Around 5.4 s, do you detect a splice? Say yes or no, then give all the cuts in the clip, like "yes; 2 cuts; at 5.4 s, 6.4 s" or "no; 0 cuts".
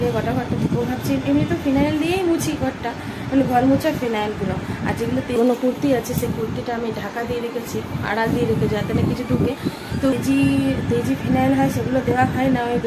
yes; 2 cuts; at 5.4 s, 10.1 s